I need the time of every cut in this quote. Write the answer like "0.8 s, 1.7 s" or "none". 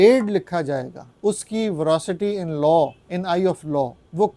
1.0 s, 3.4 s